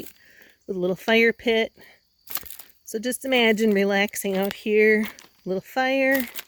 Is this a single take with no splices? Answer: yes; 0 cuts

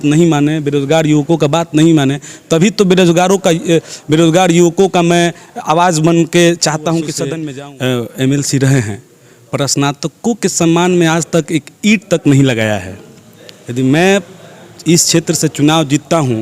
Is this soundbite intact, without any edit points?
no; 1 cut; at 7.3 s

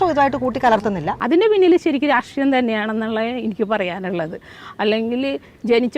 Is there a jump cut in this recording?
yes; 1 cut; at 1.1 s

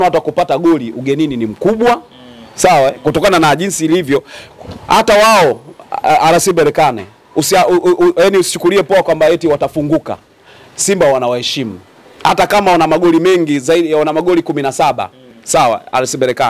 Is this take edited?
no; 0 cuts

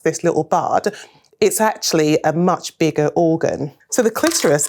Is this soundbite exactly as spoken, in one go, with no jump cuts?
no; 1 cut; at 3.7 s

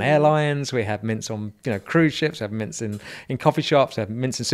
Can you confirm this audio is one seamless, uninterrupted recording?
yes; 0 cuts

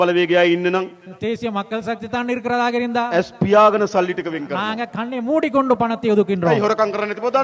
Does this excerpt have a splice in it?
no; 0 cuts

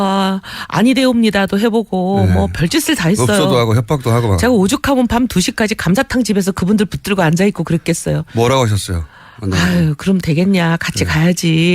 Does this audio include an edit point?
yes; 1 cut; at 2.3 s

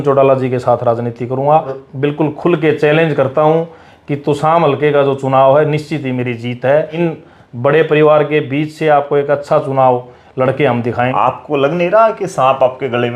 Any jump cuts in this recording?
yes; 3 cuts; at 1.8 s, 6.9 s, 11.1 s

